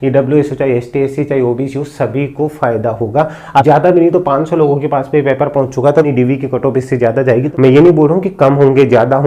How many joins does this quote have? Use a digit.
3